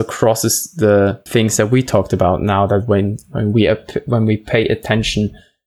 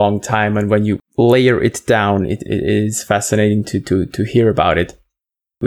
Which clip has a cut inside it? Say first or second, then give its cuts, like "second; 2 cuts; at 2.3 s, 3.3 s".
second; 1 cut; at 1.0 s